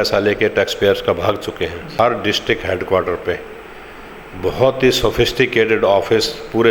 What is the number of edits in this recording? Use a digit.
1